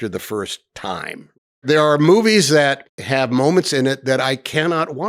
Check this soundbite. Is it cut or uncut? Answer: cut